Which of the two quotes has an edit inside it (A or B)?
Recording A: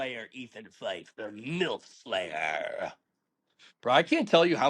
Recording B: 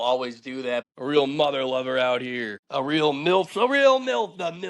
B